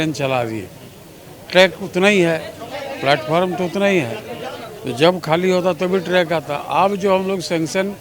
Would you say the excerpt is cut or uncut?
uncut